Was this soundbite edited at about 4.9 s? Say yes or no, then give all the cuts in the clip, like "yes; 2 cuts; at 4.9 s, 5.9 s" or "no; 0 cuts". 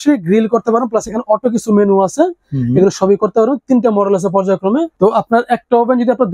yes; 1 cut; at 4.9 s